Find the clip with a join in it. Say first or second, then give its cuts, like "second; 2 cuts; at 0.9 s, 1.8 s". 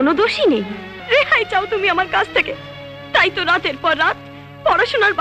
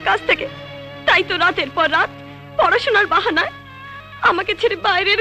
first; 1 cut; at 0.9 s